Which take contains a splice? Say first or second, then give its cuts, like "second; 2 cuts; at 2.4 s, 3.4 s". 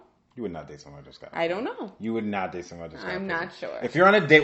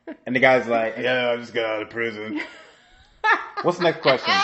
second; 1 cut; at 1.0 s